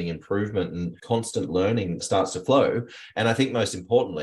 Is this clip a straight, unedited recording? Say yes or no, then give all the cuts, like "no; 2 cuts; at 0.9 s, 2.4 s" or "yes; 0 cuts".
no; 1 cut; at 0.9 s